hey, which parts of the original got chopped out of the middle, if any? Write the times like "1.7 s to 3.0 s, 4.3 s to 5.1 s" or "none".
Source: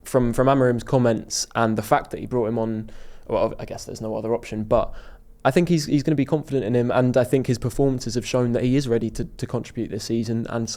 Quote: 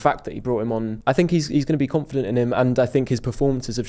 2.8 s to 5.3 s